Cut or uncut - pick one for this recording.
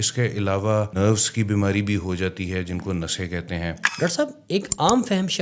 cut